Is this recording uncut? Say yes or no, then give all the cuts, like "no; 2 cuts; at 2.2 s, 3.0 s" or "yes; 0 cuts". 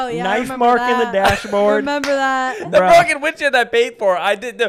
yes; 0 cuts